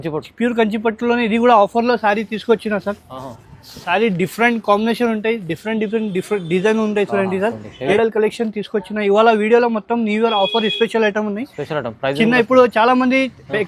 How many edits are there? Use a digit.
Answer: 1